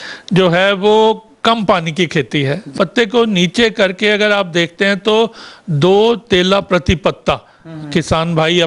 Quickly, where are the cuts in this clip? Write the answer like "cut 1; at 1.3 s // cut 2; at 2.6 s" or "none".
cut 1; at 2.7 s